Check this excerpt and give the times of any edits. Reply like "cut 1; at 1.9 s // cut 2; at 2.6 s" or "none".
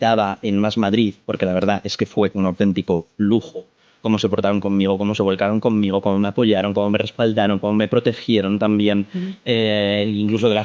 none